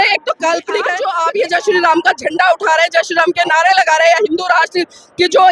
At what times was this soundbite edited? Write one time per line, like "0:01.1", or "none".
0:01.0